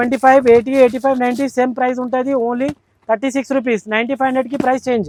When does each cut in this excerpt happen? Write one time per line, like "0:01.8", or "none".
none